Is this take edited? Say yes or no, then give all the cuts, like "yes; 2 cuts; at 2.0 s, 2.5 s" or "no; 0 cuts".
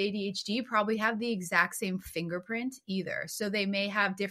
no; 0 cuts